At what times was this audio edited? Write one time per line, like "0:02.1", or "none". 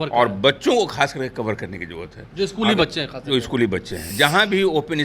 0:04.1

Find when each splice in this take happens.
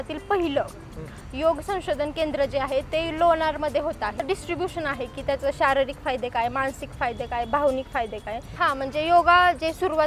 0:04.2
0:08.4

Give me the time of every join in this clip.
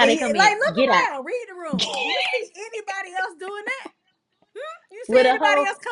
none

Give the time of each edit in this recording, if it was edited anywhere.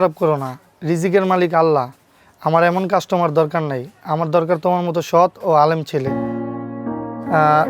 none

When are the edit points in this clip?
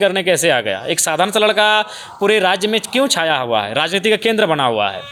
none

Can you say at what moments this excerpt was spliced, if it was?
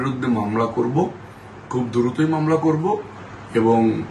none

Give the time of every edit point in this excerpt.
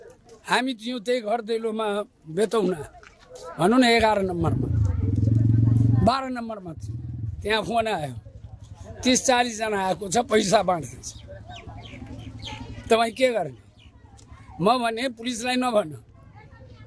none

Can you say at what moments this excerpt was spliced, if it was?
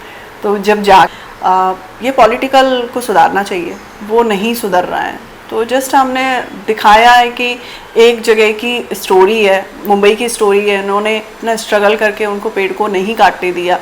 0:01.1

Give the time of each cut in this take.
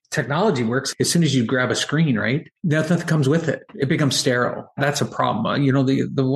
0:00.9
0:02.5
0:03.7
0:04.8

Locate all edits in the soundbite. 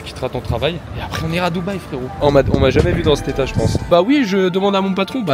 0:00.9
0:02.2
0:03.9

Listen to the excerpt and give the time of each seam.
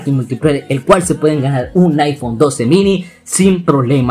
none

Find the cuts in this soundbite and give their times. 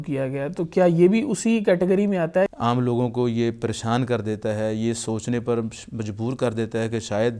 0:02.5

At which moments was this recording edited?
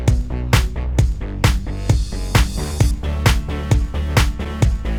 none

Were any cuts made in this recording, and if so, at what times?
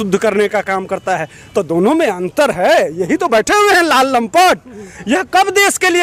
none

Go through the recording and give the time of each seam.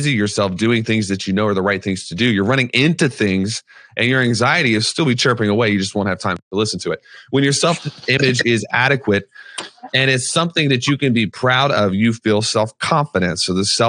none

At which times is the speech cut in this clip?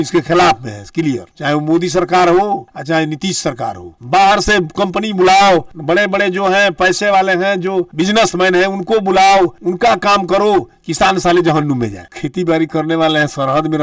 0:03.9
0:12.0

